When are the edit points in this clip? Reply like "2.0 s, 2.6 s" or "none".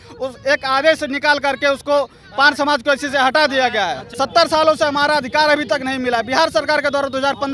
4.1 s